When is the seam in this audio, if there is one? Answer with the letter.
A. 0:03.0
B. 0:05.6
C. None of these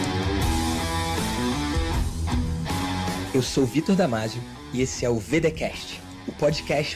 C